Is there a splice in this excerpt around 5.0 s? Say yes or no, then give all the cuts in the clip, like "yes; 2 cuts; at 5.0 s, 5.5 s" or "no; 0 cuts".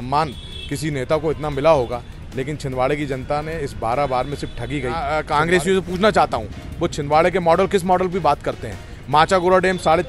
yes; 1 cut; at 5.0 s